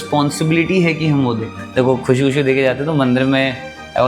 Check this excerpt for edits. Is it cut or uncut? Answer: cut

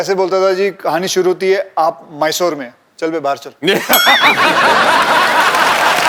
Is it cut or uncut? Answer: uncut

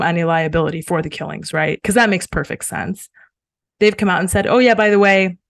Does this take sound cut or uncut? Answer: uncut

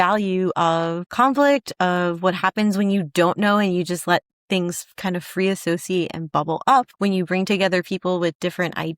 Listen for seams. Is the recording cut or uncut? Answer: cut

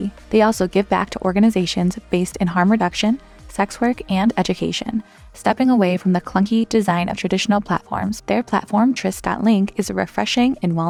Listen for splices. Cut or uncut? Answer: uncut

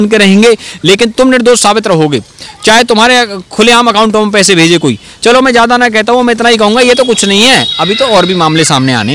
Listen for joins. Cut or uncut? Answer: uncut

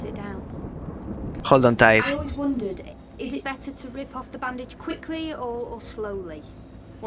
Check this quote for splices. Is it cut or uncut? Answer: cut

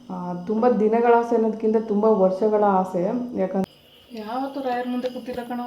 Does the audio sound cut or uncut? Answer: cut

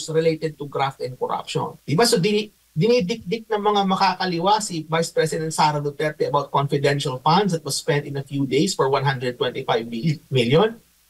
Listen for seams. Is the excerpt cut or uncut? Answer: cut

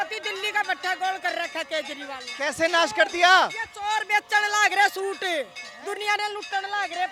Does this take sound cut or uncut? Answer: uncut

